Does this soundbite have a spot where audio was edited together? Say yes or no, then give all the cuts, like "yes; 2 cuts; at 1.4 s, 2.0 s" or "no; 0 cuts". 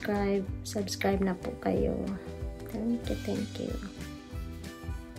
no; 0 cuts